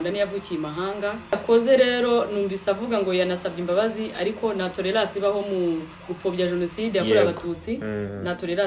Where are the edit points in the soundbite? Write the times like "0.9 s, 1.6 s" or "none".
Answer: 1.4 s